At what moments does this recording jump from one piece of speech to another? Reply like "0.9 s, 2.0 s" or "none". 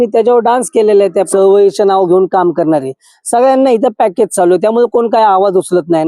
1.3 s